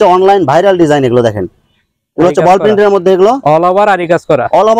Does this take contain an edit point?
no; 0 cuts

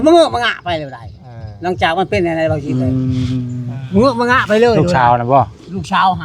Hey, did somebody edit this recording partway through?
no; 0 cuts

